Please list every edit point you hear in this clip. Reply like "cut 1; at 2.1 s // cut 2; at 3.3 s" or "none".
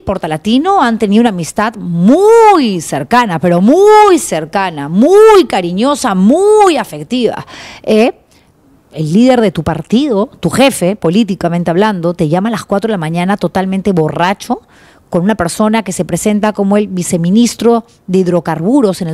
none